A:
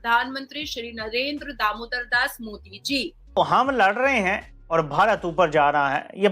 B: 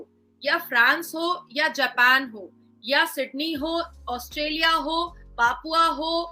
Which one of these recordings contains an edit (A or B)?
A